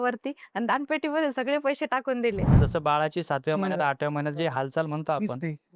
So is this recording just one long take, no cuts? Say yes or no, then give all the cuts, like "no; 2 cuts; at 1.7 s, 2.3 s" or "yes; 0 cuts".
no; 1 cut; at 2.5 s